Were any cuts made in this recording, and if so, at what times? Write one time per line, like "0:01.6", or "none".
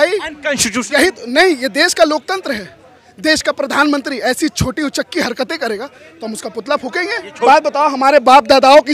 0:03.0
0:07.5